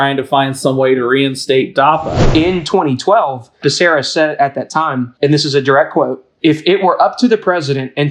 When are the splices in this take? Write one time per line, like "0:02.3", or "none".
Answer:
0:02.2
0:03.6
0:05.1
0:06.2